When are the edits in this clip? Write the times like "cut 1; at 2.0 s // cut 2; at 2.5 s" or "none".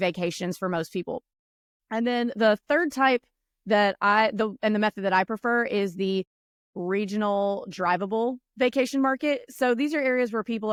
none